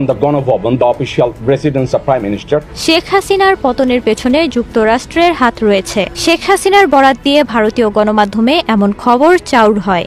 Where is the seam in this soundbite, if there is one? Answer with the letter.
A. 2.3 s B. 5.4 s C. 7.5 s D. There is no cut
D